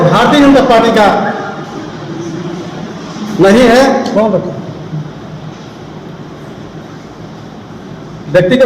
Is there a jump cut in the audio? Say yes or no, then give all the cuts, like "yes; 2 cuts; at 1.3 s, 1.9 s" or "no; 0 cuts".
no; 0 cuts